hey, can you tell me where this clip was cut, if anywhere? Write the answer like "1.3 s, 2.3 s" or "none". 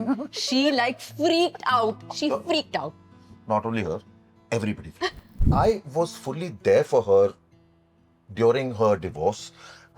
5.3 s